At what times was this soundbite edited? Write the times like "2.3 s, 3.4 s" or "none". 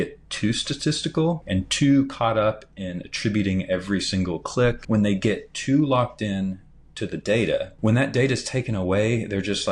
1.4 s, 4.8 s, 7.7 s